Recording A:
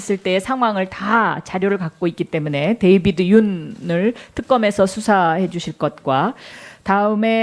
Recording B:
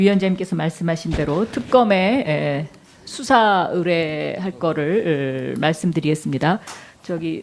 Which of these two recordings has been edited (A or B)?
A